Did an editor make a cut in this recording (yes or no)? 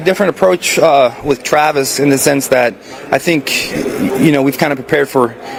no